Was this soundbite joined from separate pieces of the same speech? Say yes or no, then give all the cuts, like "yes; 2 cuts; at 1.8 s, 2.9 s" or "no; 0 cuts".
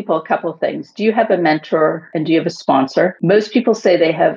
yes; 2 cuts; at 2.1 s, 3.2 s